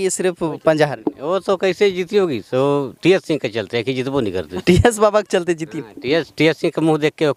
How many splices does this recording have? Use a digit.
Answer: 0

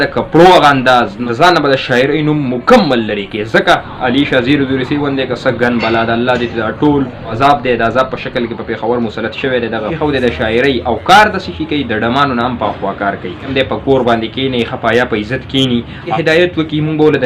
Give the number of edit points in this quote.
6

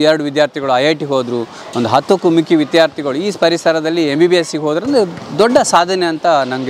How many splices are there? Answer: 0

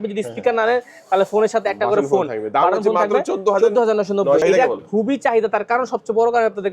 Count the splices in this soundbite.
1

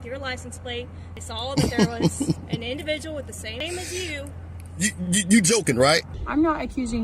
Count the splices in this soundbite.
3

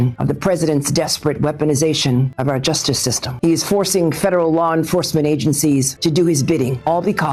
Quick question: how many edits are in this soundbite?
0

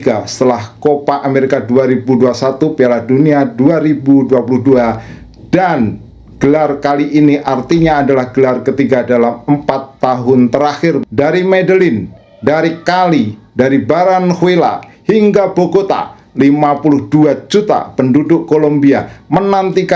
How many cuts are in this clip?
1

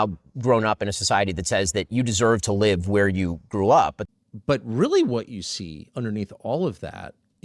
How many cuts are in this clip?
1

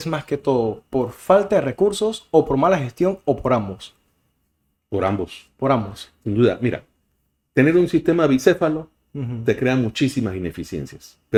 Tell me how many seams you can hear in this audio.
0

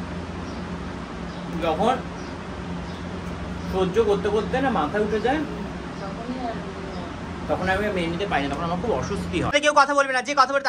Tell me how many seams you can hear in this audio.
1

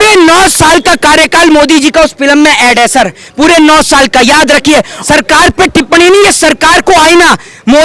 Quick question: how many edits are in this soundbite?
1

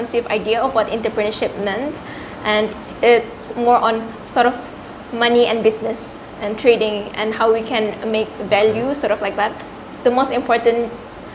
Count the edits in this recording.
2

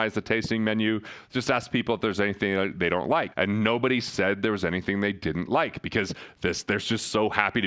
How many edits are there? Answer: 1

